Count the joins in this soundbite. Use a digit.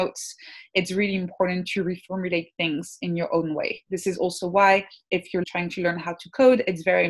1